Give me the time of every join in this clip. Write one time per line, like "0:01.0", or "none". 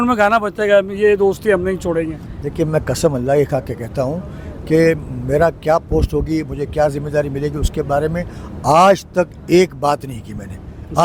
none